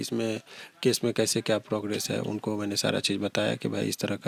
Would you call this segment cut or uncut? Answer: uncut